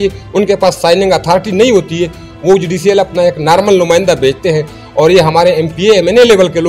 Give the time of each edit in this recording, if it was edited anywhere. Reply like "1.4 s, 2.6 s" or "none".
none